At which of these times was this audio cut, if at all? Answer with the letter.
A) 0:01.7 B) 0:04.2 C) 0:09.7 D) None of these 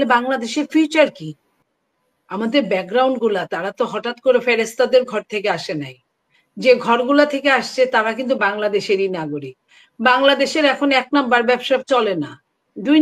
A